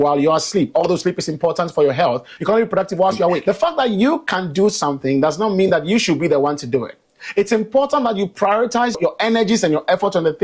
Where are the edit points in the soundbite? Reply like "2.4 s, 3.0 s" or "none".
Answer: 2.3 s, 3.4 s, 9.0 s